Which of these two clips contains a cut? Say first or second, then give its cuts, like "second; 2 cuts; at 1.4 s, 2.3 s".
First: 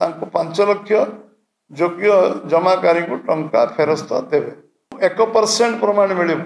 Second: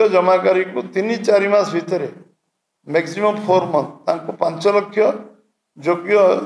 first; 1 cut; at 4.9 s